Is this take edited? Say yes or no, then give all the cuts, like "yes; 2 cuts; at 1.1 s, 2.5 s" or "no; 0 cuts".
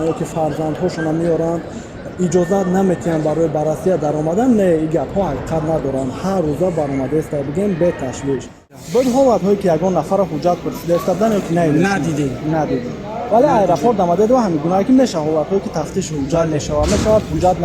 yes; 1 cut; at 8.7 s